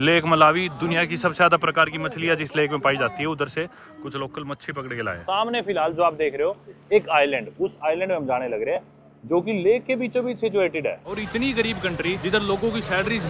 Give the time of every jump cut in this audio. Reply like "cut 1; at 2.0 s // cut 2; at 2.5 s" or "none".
cut 1; at 5.2 s // cut 2; at 11.1 s // cut 3; at 12.2 s

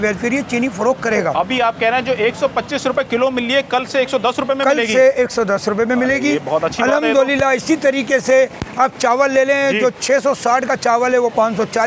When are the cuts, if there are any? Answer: none

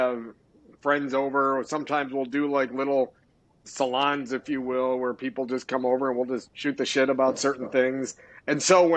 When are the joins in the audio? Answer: cut 1; at 6.5 s

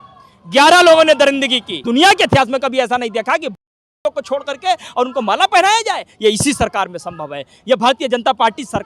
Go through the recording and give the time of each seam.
cut 1; at 1.7 s

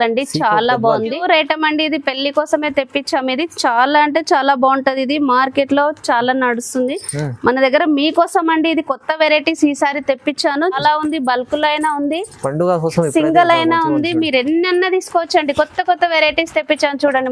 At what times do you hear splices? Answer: cut 1; at 1.2 s // cut 2; at 10.8 s

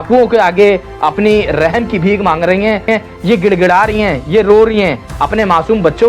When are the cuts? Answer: cut 1; at 2.9 s

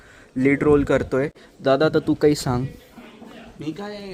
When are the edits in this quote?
none

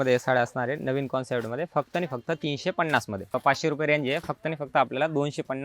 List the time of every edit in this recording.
cut 1; at 3.4 s

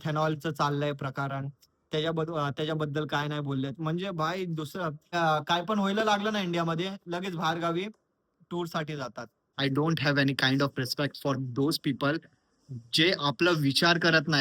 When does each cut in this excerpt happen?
cut 1; at 5.1 s // cut 2; at 9.5 s

